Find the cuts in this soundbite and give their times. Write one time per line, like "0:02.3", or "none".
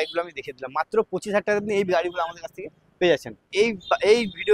0:03.5